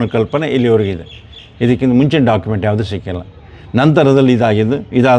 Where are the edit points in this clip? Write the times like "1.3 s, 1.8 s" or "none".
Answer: none